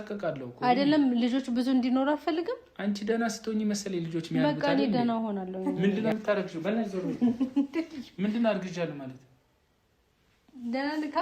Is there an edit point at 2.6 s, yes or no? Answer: no